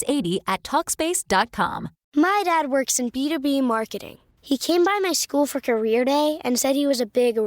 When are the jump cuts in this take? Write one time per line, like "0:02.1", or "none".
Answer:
0:01.9